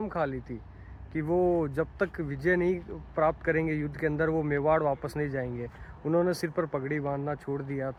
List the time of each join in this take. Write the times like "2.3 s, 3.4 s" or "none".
none